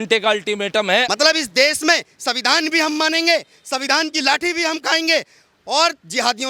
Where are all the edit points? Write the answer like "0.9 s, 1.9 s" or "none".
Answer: 1.1 s